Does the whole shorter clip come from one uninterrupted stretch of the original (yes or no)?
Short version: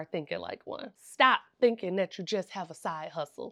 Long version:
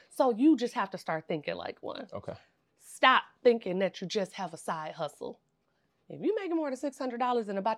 no